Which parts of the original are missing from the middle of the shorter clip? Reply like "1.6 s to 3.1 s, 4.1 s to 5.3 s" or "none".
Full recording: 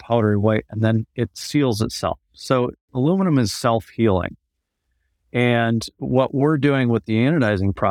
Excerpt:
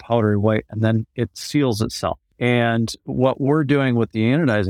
2.3 s to 5.2 s